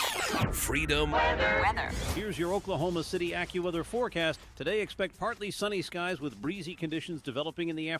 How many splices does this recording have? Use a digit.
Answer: 1